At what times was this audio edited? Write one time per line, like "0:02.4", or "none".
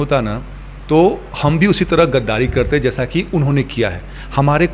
none